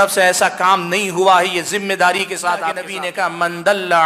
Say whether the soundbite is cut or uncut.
cut